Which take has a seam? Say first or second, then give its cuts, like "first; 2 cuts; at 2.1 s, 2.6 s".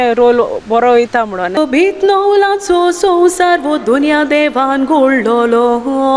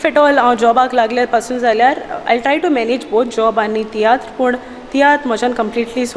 first; 1 cut; at 1.6 s